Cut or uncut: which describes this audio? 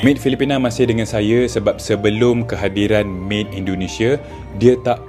uncut